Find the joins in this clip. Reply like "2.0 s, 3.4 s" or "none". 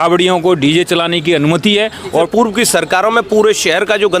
2.3 s